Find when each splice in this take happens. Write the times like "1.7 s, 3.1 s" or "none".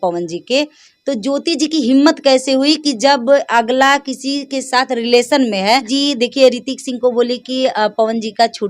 5.9 s